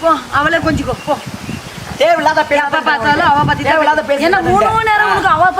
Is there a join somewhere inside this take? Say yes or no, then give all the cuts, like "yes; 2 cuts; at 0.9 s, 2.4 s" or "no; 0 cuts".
no; 0 cuts